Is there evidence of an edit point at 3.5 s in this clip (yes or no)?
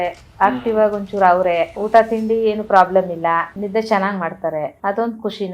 yes